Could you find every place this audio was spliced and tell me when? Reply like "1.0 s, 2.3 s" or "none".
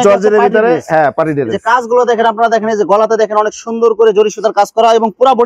none